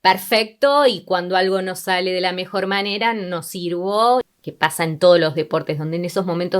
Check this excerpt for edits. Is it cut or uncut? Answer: cut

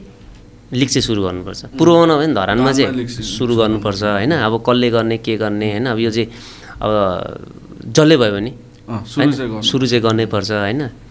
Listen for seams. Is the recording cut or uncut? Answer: uncut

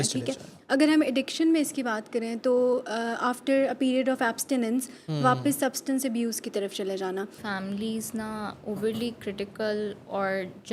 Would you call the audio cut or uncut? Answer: cut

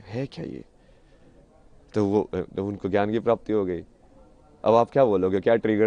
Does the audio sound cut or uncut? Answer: uncut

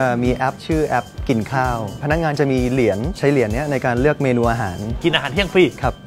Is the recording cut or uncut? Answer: cut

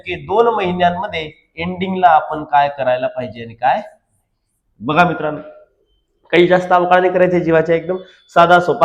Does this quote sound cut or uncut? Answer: uncut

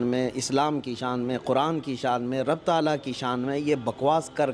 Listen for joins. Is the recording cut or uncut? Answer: uncut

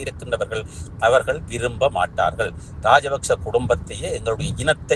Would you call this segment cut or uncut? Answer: uncut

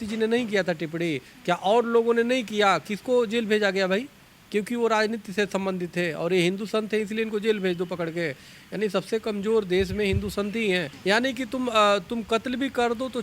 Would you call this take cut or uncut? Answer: cut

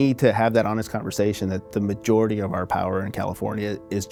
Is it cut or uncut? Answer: uncut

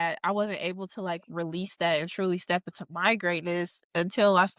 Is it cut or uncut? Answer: uncut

